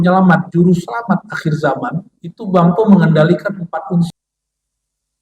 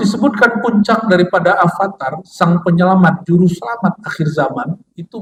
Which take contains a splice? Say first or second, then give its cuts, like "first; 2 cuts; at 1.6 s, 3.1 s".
first; 1 cut; at 4.1 s